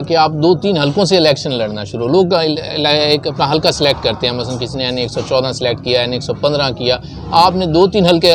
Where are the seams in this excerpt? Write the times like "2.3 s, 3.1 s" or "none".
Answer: none